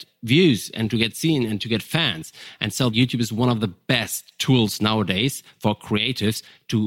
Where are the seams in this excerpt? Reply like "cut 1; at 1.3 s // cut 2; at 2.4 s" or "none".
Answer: cut 1; at 2.9 s